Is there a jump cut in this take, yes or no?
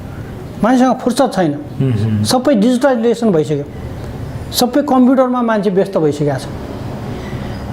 no